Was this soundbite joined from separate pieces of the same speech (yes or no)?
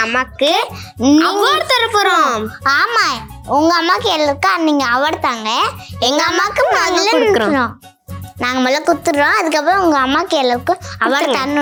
no